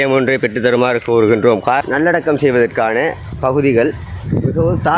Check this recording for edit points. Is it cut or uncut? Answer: cut